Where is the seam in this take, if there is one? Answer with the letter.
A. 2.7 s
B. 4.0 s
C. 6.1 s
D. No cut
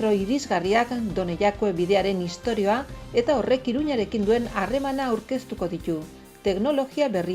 D